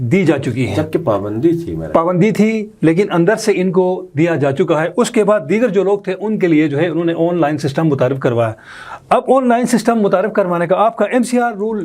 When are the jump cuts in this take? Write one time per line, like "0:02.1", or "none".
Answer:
none